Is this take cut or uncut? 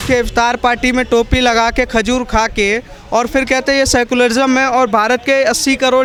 uncut